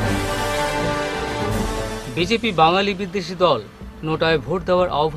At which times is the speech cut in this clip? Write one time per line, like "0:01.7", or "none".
none